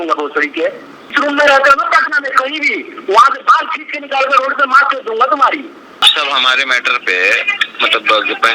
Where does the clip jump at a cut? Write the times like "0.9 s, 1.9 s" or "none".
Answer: 1.1 s, 6.0 s